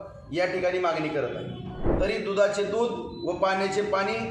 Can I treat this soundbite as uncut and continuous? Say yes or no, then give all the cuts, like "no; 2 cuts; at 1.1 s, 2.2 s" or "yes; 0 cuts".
no; 1 cut; at 1.8 s